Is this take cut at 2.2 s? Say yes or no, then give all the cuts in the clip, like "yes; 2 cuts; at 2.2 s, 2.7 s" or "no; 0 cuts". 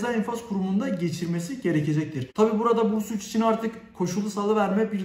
yes; 1 cut; at 2.2 s